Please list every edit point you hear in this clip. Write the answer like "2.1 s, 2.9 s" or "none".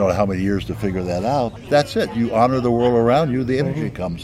1.6 s

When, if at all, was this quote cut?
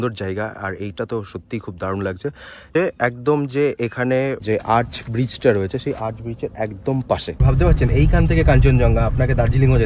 2.7 s, 4.4 s, 7.4 s

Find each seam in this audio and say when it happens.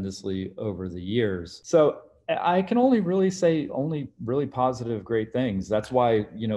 1.5 s

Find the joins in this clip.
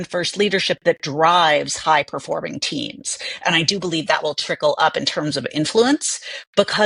none

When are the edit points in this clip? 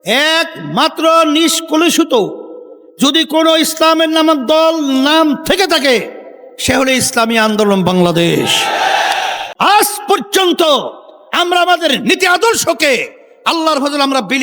9.4 s

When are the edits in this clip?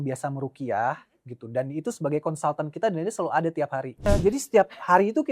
4.1 s

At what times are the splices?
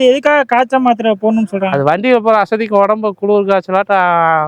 none

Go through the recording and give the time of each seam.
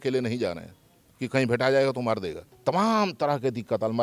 2.4 s

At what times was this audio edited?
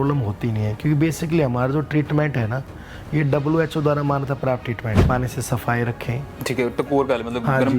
5.1 s

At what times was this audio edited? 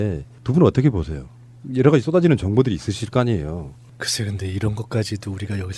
none

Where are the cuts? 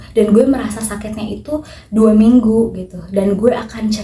none

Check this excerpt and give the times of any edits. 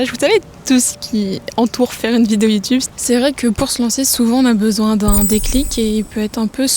2.9 s

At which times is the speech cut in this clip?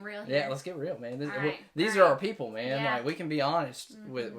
none

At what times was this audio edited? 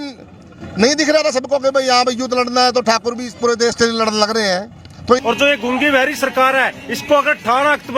5.2 s

